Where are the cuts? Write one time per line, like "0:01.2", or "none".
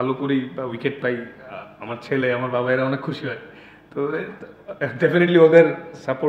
none